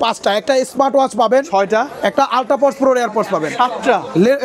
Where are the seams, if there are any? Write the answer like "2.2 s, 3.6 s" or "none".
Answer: none